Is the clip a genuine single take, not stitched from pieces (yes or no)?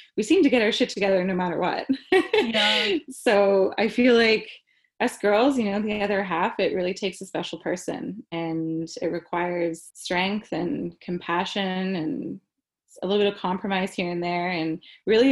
no